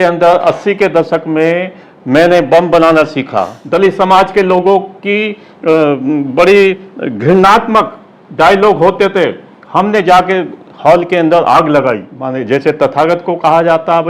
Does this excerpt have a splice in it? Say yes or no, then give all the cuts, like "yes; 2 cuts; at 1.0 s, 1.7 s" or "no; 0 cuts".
yes; 2 cuts; at 3.6 s, 12.2 s